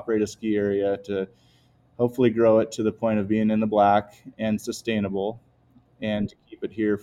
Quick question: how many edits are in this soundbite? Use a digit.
0